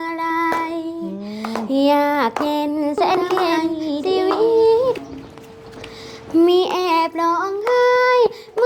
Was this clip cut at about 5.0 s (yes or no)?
yes